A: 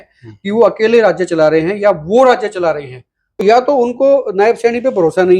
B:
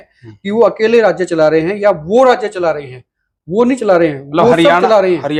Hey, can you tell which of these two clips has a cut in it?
A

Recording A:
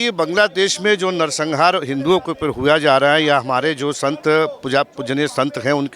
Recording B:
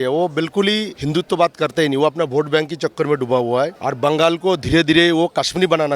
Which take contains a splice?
B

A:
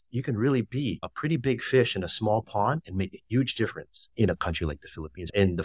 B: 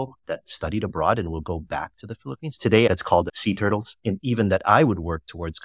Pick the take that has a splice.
B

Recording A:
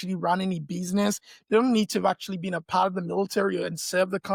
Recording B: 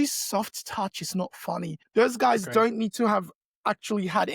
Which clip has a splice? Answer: B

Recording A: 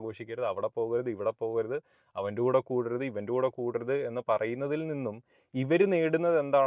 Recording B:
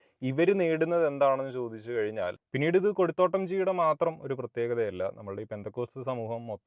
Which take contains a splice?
B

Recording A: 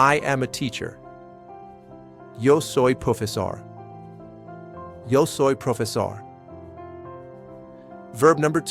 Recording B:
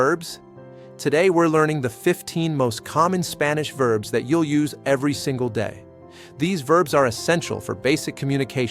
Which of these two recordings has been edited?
A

